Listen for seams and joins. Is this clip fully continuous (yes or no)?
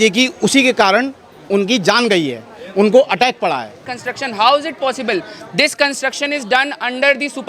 no